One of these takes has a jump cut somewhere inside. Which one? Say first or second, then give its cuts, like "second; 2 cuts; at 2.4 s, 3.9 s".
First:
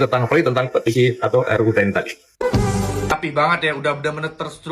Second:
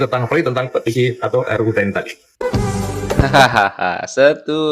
first; 1 cut; at 3.1 s